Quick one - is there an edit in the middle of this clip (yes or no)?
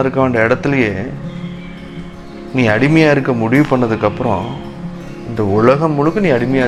no